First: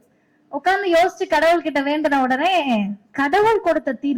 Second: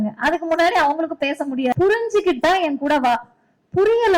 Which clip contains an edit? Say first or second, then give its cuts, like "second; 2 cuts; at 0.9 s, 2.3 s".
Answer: second; 1 cut; at 1.7 s